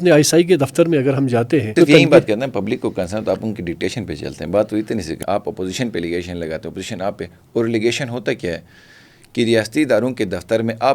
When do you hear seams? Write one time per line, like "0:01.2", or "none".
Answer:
0:01.7
0:05.2